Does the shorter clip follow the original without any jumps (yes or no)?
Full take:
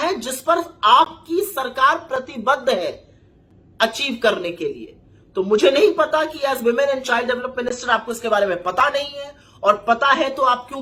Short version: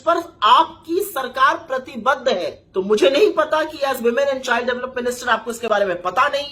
no